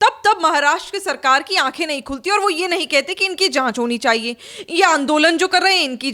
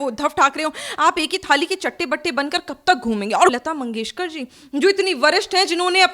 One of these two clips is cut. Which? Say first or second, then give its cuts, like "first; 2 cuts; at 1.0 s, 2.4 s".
second; 1 cut; at 3.5 s